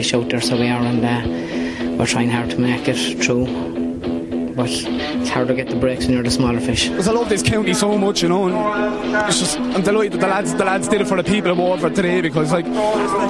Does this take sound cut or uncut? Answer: uncut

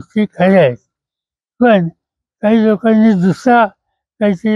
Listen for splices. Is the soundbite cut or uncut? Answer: uncut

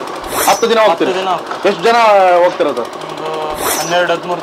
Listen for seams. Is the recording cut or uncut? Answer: uncut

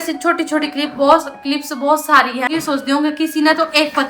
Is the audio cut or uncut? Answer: cut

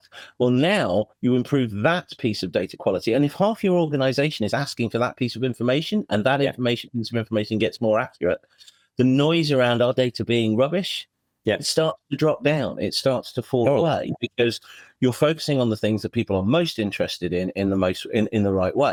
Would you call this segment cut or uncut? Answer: uncut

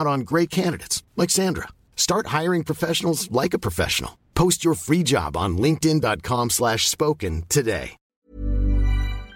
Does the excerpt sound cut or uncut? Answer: cut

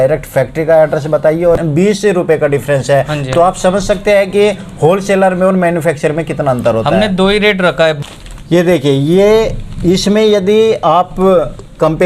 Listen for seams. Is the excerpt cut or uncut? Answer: cut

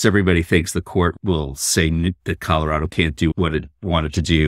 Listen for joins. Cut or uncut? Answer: cut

